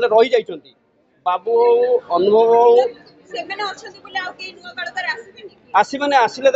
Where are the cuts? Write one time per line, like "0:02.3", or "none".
none

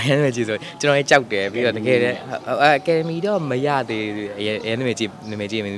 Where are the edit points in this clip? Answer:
none

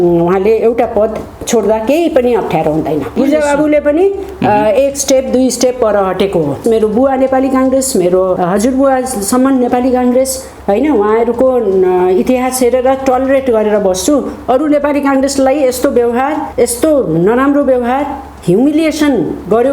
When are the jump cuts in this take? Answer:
0:03.2
0:06.6
0:08.4
0:16.5

